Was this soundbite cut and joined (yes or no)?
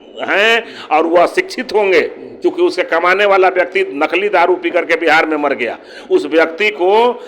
no